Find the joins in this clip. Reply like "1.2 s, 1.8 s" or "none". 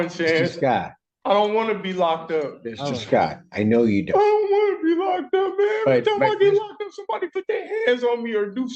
none